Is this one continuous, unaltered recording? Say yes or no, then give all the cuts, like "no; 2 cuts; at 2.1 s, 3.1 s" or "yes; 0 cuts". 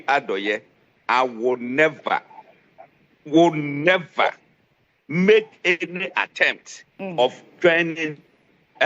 yes; 0 cuts